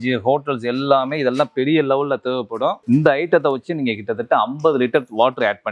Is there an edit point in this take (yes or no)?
no